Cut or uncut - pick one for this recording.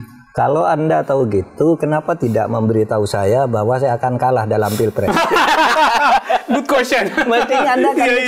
uncut